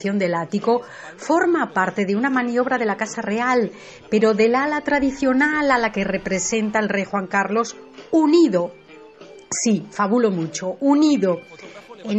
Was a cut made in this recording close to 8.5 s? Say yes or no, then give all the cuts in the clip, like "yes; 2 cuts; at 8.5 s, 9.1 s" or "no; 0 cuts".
yes; 1 cut; at 8.5 s